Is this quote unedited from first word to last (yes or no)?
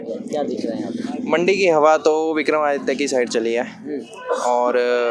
yes